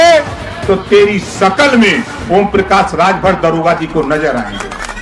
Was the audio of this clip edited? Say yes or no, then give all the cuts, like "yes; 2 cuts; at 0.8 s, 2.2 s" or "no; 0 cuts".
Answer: no; 0 cuts